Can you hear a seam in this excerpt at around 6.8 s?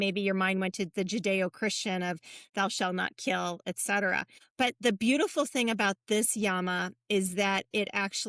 no; 1 cut; at 4.4 s

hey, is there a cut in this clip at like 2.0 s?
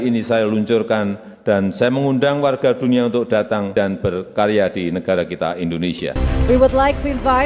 no; 2 cuts; at 3.7 s, 6.2 s

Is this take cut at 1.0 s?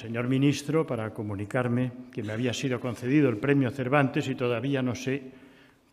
no; 1 cut; at 3.3 s

